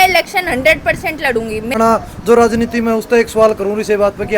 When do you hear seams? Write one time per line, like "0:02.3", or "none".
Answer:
0:01.8